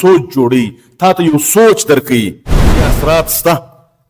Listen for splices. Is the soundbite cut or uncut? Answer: cut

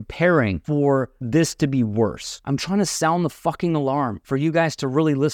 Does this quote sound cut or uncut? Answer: cut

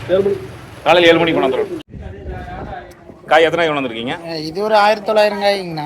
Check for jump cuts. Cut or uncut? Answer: cut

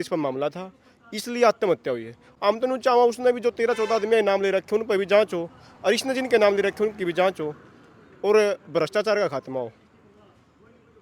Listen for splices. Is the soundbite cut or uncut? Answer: uncut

